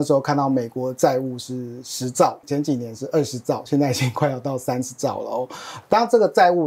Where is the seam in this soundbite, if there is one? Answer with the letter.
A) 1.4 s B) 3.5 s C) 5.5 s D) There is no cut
D